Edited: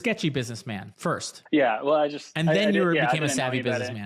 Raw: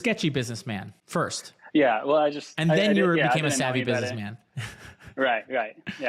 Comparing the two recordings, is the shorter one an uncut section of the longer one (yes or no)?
no